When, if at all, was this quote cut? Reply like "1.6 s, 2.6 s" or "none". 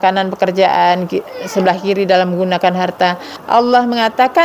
3.3 s